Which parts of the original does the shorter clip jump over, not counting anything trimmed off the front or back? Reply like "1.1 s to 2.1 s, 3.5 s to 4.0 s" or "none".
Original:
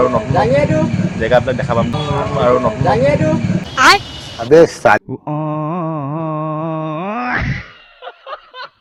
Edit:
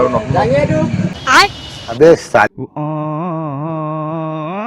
1.0 s to 3.5 s